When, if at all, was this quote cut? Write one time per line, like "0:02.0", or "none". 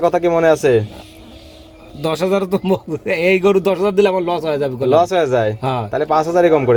none

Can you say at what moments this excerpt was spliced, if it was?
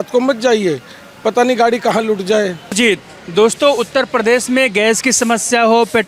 none

